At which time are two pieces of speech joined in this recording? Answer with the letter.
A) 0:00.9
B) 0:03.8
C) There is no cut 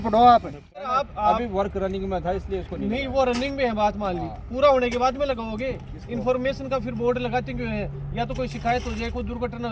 A